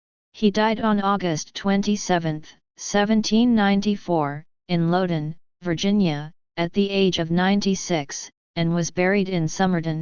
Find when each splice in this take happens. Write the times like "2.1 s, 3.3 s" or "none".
none